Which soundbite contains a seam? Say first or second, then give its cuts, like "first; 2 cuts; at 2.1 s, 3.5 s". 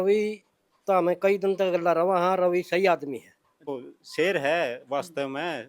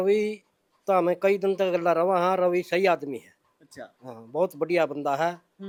first; 1 cut; at 3.7 s